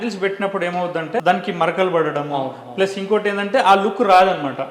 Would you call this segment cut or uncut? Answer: cut